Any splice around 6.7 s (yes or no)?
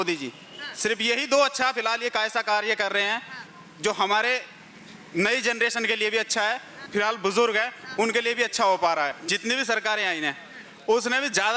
yes